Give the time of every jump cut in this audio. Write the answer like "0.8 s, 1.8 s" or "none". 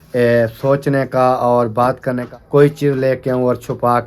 2.2 s